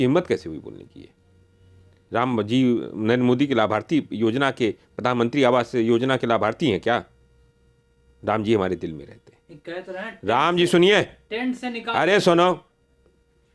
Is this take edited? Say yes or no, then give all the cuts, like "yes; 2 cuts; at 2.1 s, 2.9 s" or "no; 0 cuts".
no; 0 cuts